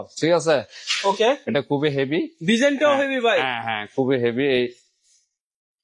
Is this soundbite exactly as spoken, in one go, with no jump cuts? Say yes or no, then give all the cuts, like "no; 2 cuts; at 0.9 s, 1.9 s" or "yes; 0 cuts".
yes; 0 cuts